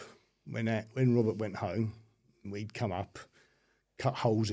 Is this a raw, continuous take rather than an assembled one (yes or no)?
yes